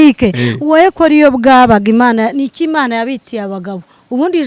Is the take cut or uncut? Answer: uncut